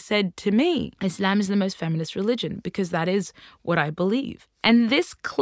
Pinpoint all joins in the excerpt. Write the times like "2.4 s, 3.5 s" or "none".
0.9 s, 4.4 s